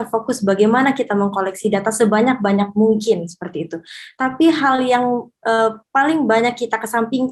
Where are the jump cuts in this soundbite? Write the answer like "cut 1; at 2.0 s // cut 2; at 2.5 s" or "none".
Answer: none